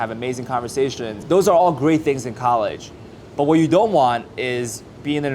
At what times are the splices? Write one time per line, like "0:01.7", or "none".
0:01.1